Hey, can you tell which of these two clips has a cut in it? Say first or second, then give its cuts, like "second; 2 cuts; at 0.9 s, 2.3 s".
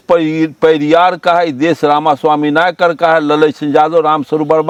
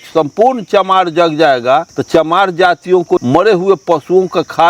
second; 2 cuts; at 2.0 s, 3.2 s